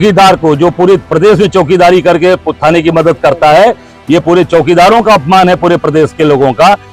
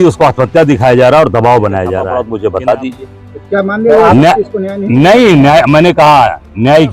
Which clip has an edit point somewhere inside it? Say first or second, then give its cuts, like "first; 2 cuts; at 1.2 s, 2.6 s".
second; 1 cut; at 2.1 s